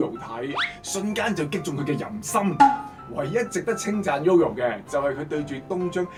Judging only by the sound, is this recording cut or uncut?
uncut